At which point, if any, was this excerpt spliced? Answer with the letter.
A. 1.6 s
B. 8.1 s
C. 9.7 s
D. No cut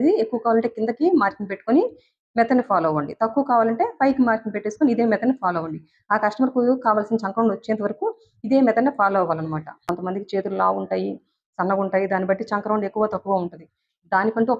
C